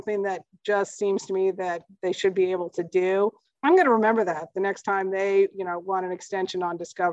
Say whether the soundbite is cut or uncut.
uncut